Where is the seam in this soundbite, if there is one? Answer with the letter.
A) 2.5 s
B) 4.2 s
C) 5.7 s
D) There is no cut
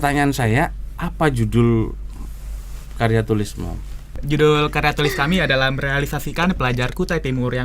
B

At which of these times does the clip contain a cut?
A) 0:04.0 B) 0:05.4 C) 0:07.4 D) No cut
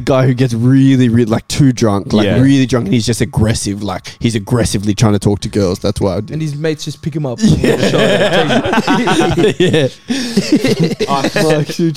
D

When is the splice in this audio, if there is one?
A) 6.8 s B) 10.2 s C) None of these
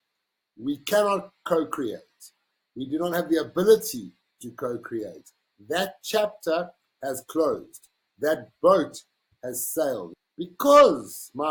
B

